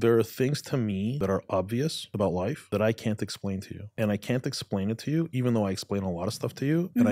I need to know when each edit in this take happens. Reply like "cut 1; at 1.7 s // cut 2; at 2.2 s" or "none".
cut 1; at 1.2 s // cut 2; at 2.5 s // cut 3; at 3.8 s